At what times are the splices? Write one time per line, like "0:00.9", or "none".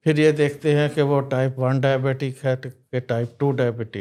none